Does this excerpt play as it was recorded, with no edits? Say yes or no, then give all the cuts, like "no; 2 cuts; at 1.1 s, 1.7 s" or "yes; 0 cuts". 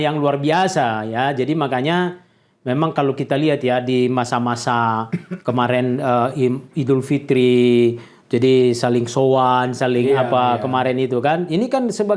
yes; 0 cuts